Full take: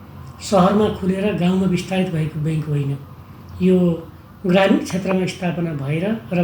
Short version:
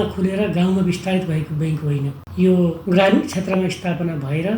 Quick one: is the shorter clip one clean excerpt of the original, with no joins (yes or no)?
no